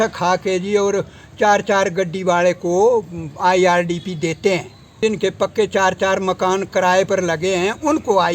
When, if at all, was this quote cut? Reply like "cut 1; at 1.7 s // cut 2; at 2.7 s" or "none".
cut 1; at 5.0 s